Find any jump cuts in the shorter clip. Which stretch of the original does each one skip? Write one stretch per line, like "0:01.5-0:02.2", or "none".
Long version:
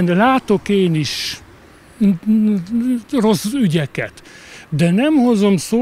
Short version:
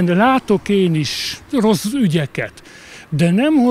0:01.4-0:03.0